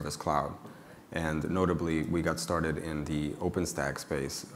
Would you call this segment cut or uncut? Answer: uncut